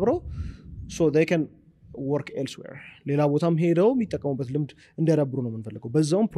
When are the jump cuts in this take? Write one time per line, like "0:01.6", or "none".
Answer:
none